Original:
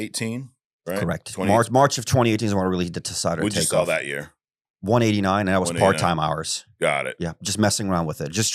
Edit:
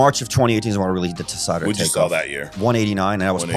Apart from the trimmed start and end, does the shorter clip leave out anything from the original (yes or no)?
yes